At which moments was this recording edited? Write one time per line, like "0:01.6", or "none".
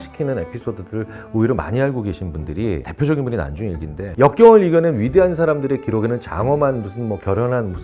0:04.0